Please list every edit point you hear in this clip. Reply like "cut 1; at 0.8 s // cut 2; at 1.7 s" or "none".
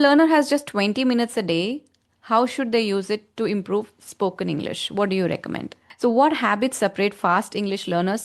cut 1; at 5.8 s